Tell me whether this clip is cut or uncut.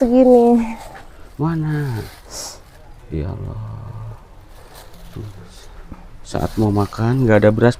uncut